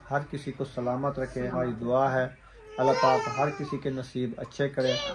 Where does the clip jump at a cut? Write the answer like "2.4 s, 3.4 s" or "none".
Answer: 1.5 s

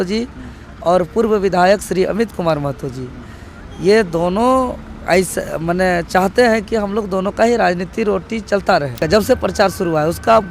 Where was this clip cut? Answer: 9.0 s

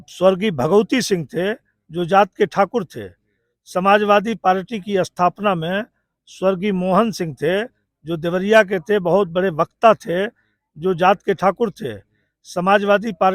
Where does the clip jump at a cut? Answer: none

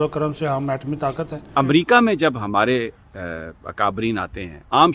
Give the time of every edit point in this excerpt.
none

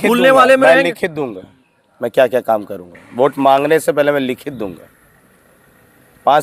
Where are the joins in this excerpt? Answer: none

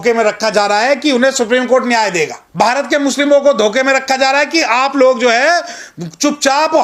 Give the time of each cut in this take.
2.4 s

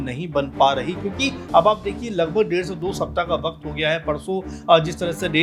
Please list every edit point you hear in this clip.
none

